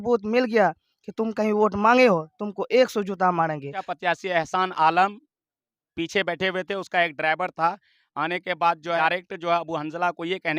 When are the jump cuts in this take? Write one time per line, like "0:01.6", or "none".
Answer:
0:03.9
0:09.0